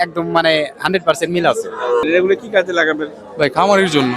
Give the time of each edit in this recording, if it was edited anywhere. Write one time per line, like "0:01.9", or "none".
0:02.0